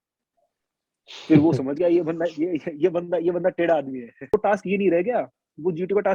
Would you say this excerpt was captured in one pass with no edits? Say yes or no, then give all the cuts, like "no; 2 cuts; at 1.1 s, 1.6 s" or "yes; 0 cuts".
no; 1 cut; at 4.3 s